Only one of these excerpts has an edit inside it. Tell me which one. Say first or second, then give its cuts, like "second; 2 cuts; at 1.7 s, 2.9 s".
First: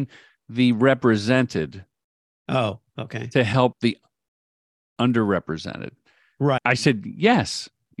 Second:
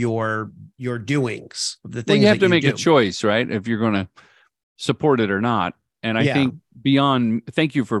first; 1 cut; at 6.7 s